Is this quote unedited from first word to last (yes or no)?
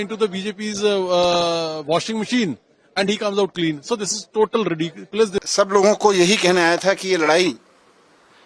no